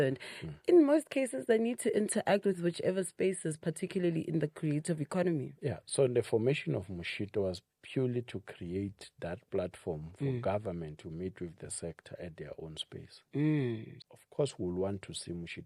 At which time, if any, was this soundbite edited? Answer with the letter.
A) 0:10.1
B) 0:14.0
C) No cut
B